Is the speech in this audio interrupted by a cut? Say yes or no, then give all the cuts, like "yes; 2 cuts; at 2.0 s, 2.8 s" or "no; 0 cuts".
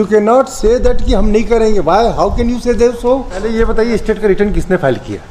yes; 1 cut; at 3.5 s